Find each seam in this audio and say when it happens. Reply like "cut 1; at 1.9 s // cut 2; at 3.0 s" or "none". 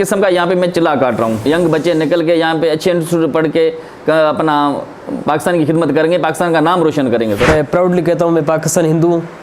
cut 1; at 1.5 s // cut 2; at 7.5 s